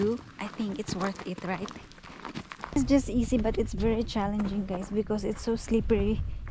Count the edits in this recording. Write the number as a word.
one